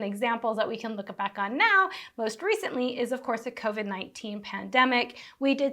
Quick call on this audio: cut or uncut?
uncut